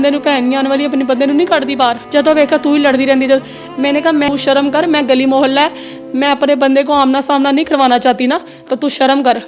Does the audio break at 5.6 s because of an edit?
no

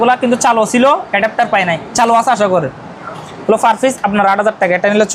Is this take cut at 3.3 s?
no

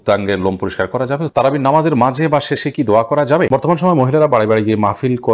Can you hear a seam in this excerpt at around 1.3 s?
yes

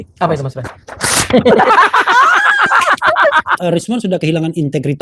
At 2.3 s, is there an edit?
no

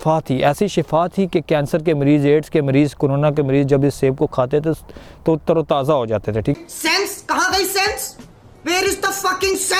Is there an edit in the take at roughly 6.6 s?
no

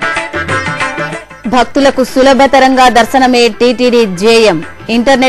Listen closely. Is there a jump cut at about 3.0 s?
no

